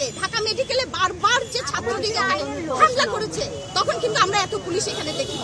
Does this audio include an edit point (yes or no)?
no